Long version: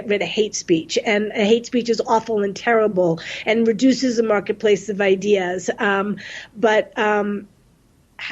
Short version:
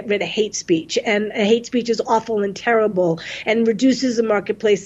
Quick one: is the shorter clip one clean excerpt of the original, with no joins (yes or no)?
yes